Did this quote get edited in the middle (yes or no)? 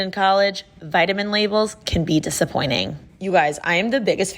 yes